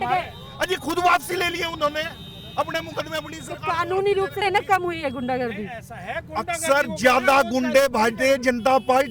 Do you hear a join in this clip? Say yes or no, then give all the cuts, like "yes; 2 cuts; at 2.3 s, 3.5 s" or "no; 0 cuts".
yes; 1 cut; at 4.4 s